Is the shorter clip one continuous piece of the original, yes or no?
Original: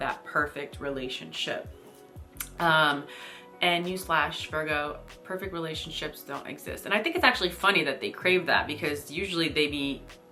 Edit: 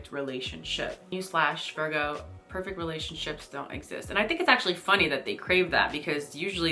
no